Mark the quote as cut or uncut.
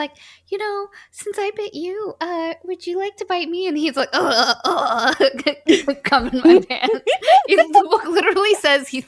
uncut